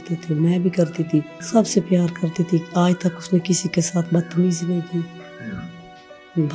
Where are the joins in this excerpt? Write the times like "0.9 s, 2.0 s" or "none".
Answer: 1.4 s